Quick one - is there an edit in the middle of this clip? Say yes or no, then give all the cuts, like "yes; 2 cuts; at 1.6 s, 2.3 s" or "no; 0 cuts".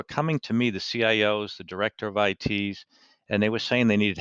no; 0 cuts